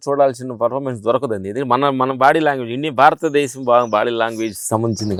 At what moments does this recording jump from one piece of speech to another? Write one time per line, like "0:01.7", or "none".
none